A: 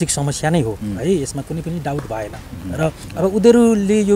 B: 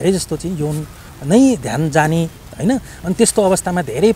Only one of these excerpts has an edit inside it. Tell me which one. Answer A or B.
A